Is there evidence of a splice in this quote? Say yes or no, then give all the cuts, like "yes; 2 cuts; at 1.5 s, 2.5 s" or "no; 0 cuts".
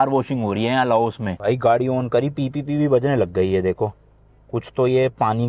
yes; 1 cut; at 1.3 s